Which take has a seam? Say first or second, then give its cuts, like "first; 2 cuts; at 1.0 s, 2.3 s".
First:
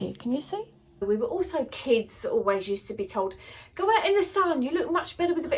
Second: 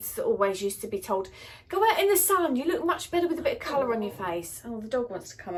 first; 1 cut; at 1.0 s